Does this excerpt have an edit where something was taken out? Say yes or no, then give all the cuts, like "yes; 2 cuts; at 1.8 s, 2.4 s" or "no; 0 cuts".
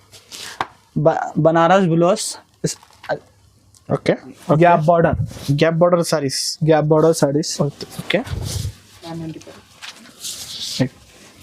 yes; 1 cut; at 4.4 s